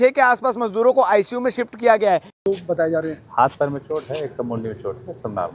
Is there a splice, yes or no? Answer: yes